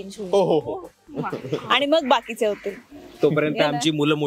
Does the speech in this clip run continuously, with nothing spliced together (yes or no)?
yes